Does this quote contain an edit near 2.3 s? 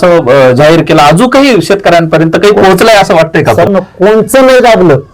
no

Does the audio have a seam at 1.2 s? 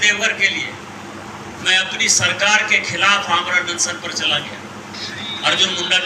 no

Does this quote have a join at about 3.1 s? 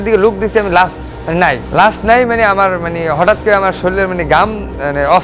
no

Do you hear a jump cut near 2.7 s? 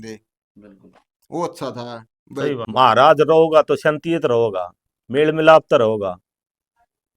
yes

